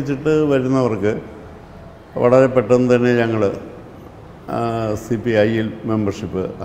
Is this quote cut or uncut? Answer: uncut